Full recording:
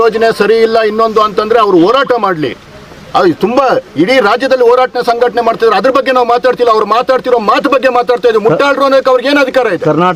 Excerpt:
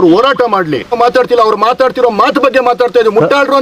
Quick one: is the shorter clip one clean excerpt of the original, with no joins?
no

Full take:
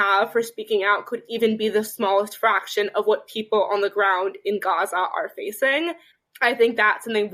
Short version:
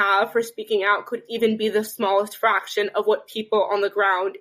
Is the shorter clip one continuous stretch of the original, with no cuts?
yes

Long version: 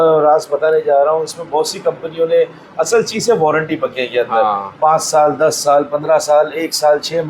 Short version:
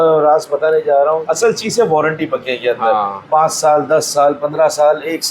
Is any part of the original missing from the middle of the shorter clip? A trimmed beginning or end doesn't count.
yes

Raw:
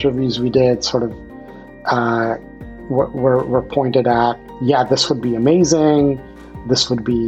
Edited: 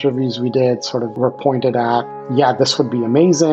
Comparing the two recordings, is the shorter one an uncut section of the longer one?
no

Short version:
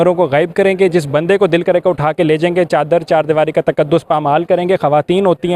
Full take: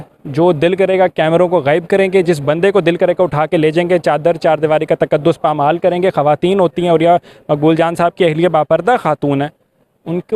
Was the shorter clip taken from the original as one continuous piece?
yes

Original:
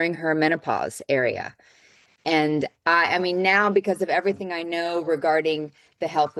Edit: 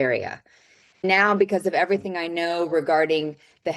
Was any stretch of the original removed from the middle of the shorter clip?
yes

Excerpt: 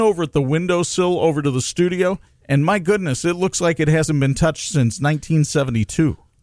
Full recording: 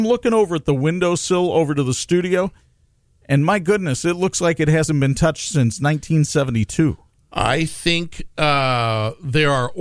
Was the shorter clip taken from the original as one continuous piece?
no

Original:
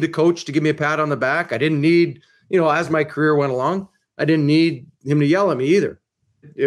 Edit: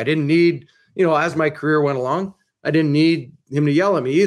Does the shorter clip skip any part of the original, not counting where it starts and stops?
no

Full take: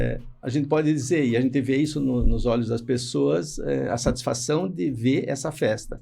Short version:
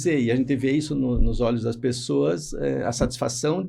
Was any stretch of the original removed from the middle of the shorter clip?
no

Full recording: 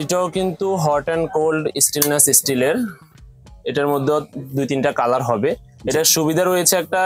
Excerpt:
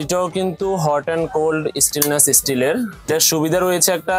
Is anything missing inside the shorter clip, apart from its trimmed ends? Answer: yes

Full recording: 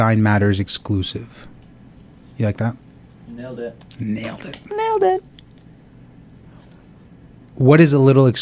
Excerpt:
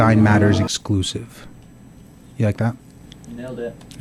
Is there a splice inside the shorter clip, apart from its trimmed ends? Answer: no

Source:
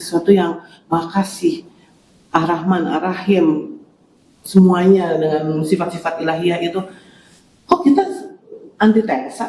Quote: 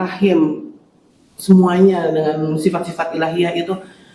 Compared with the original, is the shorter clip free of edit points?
yes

